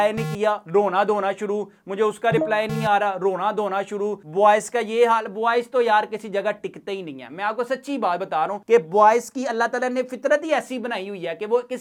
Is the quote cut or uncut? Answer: uncut